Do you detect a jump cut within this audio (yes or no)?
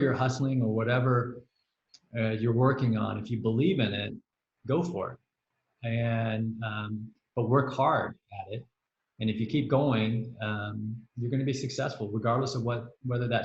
no